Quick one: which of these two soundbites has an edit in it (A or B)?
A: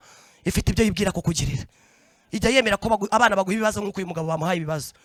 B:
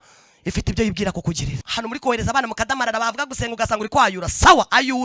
B